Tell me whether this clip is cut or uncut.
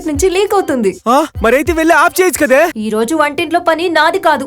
cut